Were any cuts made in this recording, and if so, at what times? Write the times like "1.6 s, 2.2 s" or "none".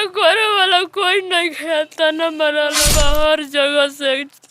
2.8 s